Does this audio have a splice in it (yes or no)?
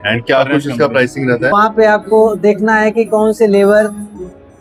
yes